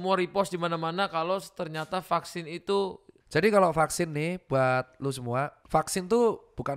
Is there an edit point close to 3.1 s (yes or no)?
yes